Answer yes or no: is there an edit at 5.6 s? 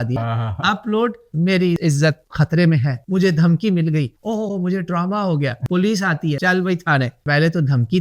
yes